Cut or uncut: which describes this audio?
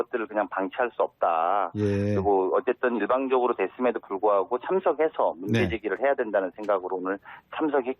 uncut